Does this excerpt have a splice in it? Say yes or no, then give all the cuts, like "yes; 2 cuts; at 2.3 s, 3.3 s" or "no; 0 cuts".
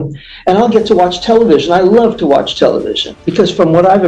yes; 1 cut; at 3.2 s